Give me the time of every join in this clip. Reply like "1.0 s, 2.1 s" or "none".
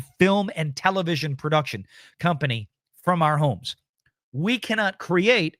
none